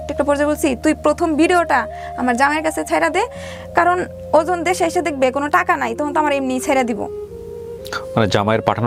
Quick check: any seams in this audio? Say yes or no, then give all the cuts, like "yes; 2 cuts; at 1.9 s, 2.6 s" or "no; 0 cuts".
no; 0 cuts